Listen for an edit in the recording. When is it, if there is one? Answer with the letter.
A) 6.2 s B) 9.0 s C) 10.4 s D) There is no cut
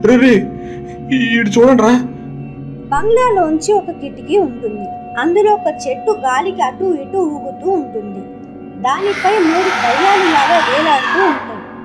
D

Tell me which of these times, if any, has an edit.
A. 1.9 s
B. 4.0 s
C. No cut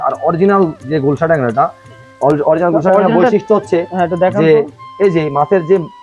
C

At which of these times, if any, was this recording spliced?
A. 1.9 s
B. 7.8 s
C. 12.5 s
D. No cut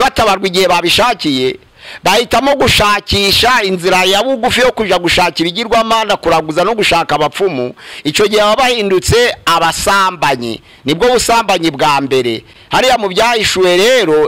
D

